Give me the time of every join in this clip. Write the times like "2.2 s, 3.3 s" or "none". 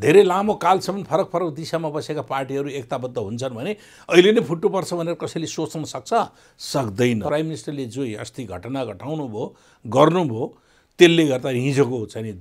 7.3 s